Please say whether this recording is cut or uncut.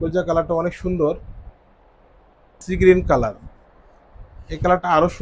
cut